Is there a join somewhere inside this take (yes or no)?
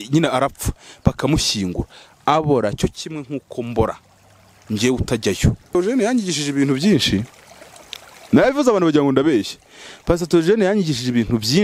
yes